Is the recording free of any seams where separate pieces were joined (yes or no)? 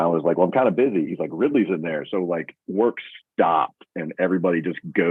yes